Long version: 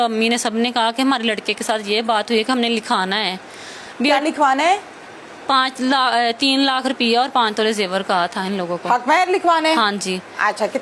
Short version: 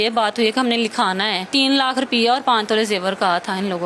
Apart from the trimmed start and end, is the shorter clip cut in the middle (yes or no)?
yes